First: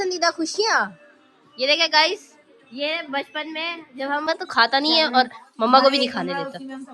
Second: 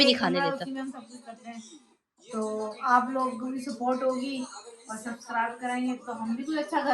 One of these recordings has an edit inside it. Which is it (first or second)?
first